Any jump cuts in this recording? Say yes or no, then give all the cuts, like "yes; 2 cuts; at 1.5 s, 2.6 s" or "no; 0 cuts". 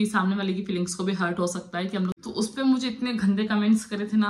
yes; 1 cut; at 2.2 s